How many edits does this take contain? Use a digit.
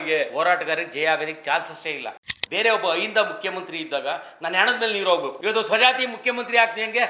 2